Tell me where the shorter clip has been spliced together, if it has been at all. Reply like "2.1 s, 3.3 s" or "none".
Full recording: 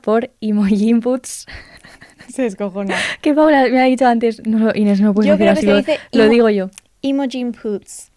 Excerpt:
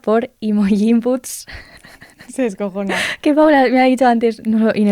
none